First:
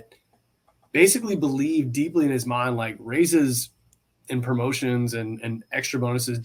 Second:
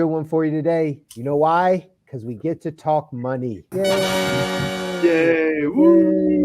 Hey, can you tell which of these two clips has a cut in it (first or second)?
second